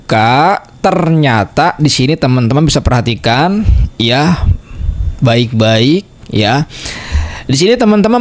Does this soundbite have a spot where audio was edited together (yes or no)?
no